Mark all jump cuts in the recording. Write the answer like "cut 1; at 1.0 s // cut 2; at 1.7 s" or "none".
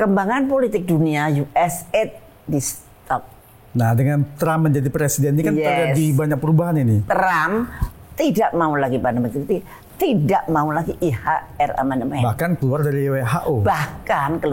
cut 1; at 7.0 s